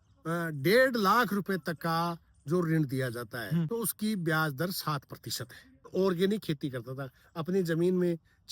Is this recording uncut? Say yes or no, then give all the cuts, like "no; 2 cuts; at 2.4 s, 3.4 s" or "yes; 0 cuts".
no; 2 cuts; at 3.7 s, 5.9 s